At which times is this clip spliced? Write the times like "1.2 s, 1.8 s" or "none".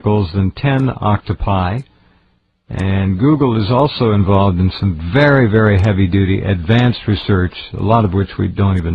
1.2 s